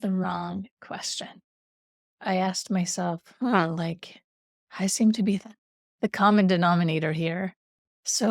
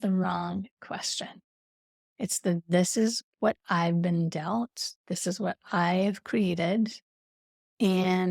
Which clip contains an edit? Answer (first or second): first